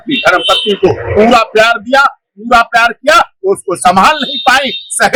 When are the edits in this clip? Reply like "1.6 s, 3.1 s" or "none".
none